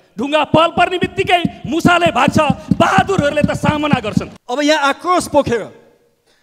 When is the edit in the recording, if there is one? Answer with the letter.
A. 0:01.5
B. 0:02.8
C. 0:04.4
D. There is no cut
C